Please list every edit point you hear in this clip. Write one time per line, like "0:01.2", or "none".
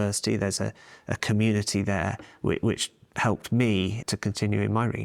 0:04.0